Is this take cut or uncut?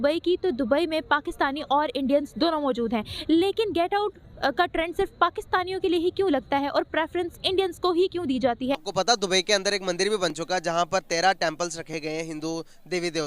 cut